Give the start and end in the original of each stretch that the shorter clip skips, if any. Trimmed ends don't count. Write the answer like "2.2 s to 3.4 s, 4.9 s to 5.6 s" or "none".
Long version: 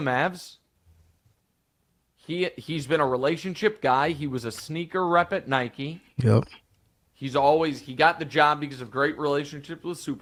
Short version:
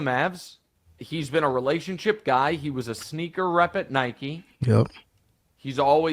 1.0 s to 2.6 s

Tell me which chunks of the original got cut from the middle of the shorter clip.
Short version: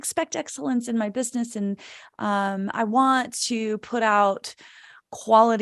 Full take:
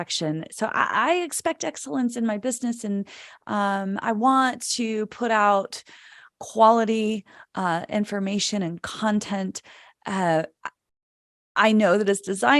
none

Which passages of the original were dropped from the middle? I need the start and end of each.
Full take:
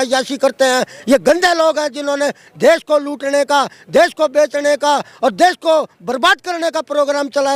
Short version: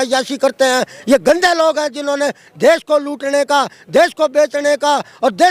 none

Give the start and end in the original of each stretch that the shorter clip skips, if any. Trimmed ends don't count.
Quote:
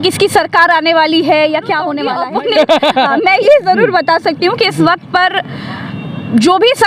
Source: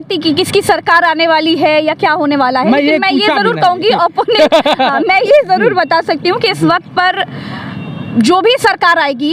2.5 s to 4.0 s

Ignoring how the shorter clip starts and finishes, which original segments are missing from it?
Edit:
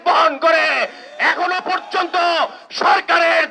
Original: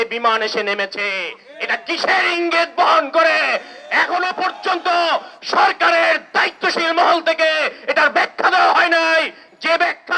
none

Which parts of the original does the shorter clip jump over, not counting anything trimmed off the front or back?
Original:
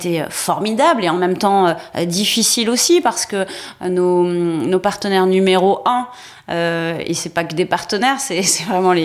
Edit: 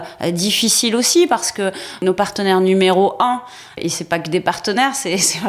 3.7 s to 4.6 s, 6.4 s to 7.0 s

